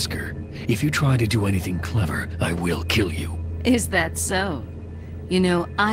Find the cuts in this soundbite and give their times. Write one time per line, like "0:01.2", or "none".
none